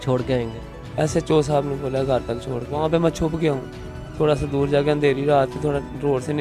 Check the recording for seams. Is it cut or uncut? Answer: cut